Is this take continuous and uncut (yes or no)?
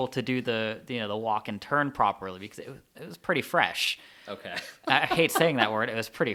yes